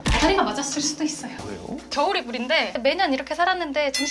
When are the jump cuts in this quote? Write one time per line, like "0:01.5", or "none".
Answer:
0:01.4
0:02.7